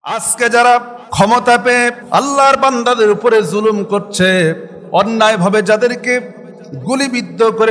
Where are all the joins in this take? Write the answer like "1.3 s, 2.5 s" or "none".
1.0 s, 2.0 s, 4.7 s